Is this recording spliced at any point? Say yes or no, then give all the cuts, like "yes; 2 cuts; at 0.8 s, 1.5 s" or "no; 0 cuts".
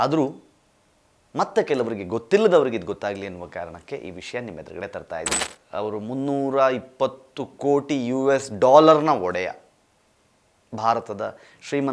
yes; 1 cut; at 5.5 s